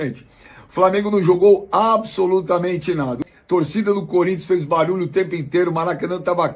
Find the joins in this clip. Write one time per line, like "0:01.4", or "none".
0:03.2